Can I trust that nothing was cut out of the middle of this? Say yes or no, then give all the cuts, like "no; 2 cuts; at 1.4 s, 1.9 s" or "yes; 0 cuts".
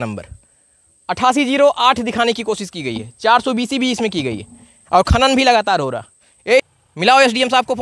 no; 1 cut; at 6.6 s